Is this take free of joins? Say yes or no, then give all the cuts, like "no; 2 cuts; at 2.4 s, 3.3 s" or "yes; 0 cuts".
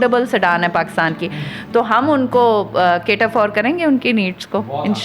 yes; 0 cuts